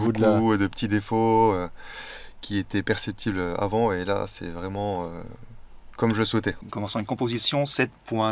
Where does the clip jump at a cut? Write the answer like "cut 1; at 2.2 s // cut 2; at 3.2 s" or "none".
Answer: cut 1; at 6.7 s